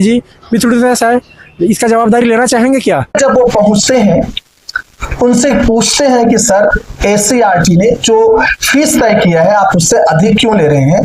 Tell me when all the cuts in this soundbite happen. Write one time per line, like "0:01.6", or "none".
none